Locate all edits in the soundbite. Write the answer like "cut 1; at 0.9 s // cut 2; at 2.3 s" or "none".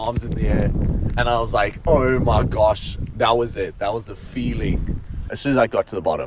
cut 1; at 3.1 s // cut 2; at 5.3 s